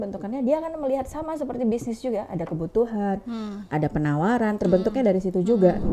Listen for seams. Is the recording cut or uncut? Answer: uncut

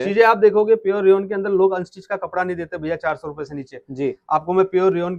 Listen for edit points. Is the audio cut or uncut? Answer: uncut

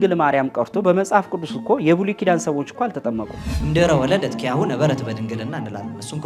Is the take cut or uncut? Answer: cut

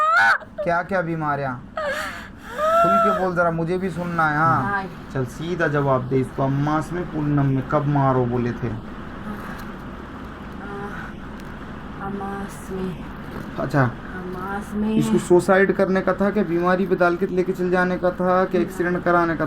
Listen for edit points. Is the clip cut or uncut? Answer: cut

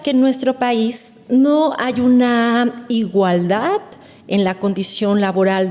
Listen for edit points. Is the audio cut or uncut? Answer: uncut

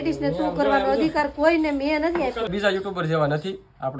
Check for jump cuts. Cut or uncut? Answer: cut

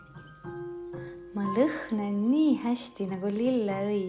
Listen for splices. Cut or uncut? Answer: uncut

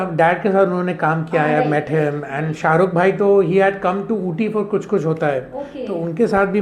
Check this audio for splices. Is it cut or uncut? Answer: cut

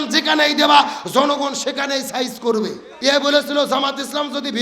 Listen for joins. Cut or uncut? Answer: cut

